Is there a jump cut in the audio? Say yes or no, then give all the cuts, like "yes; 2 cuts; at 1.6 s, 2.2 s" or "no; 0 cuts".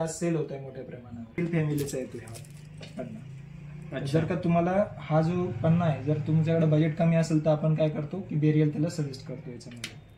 yes; 1 cut; at 1.4 s